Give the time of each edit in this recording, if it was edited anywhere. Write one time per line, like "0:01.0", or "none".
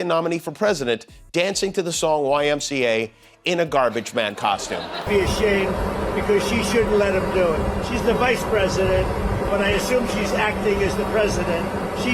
0:05.0

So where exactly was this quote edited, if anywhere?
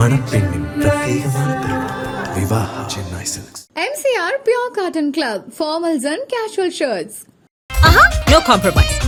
none

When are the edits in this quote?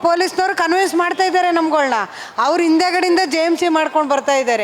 none

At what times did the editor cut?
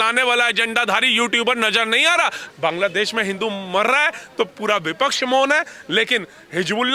0:02.4

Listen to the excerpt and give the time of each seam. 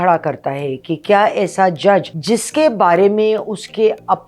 0:02.1

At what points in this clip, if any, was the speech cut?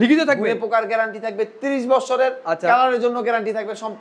none

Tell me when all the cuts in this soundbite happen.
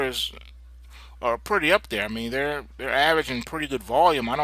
0:02.6

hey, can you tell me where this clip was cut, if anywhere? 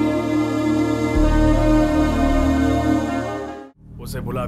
0:03.4

